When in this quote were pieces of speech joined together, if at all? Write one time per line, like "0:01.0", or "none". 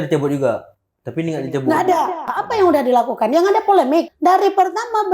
0:02.3
0:04.1